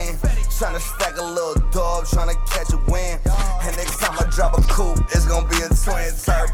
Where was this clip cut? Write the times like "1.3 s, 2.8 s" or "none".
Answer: none